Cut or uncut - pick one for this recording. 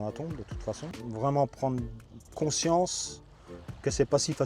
cut